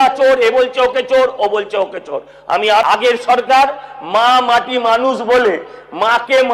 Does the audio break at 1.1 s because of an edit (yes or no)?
no